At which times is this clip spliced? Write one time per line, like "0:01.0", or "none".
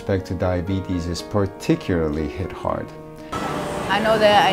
0:03.3